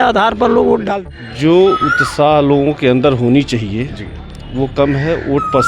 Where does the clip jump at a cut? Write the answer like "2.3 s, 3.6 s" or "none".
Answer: 0.9 s